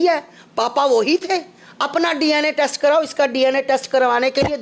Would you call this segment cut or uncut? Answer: uncut